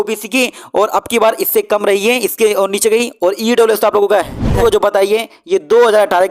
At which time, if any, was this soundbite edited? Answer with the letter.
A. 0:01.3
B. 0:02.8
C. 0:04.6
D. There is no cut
C